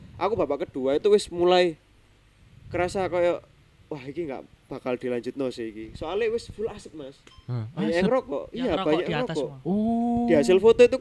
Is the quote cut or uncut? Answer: uncut